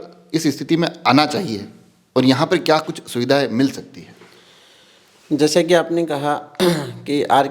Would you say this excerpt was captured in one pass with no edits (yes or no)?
yes